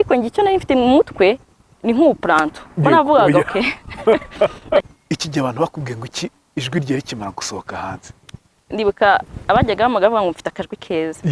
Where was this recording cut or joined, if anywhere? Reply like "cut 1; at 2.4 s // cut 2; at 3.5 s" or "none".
cut 1; at 4.9 s // cut 2; at 8.6 s